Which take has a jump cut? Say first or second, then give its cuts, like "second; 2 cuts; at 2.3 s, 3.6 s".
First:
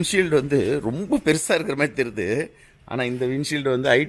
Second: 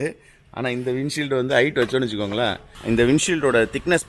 second; 1 cut; at 2.7 s